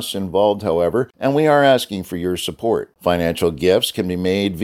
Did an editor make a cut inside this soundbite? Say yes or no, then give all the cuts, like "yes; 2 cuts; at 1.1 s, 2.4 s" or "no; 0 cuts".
yes; 1 cut; at 1.1 s